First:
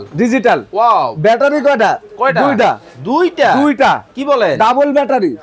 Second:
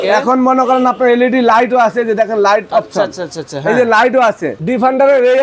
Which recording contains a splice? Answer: second; 1 cut; at 4.5 s

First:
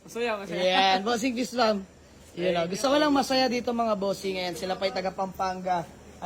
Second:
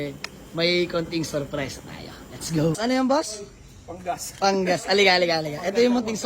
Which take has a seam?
second; 1 cut; at 2.9 s

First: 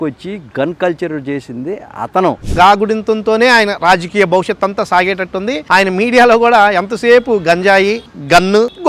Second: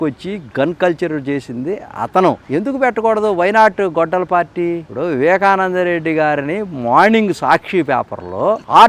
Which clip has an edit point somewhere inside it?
first; 2 cuts; at 2.5 s, 5.6 s

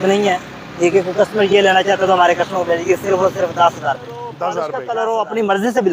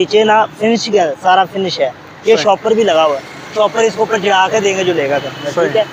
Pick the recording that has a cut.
first; 1 cut; at 4.5 s

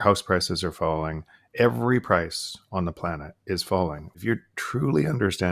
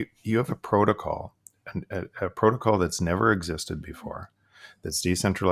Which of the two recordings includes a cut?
first; 2 cuts; at 1.4 s, 4.2 s

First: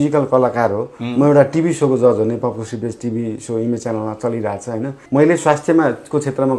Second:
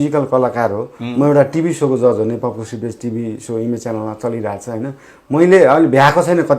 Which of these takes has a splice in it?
first; 1 cut; at 5.0 s

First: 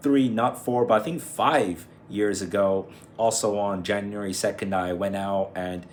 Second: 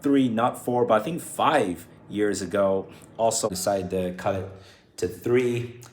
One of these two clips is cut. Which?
second; 1 cut; at 3.5 s

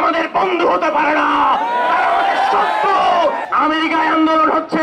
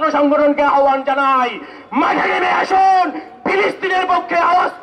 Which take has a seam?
first; 1 cut; at 3.4 s

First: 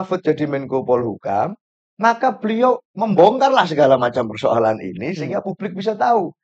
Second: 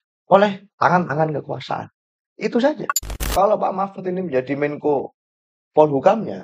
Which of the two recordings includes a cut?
second; 1 cut; at 3.2 s

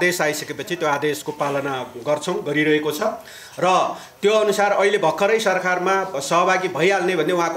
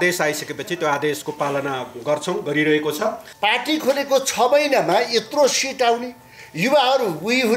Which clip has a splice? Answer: second; 1 cut; at 3.3 s

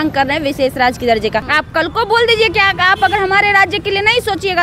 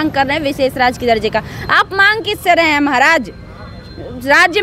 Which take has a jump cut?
first; 1 cut; at 1.5 s

